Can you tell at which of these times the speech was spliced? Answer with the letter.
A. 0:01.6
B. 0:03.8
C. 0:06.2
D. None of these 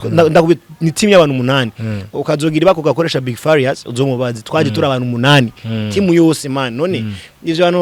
D